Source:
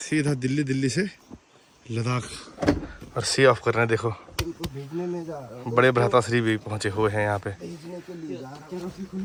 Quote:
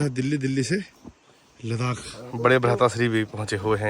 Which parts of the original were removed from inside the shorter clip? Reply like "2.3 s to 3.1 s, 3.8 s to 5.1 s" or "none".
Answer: 2.4 s to 5.5 s

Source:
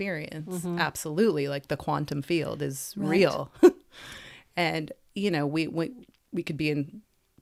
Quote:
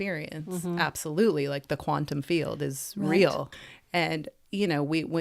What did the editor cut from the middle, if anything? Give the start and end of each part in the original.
3.4 s to 4.1 s

